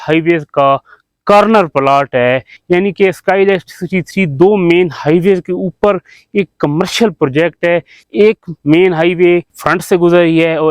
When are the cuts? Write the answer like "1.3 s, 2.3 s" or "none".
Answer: 2.5 s, 8.0 s, 9.6 s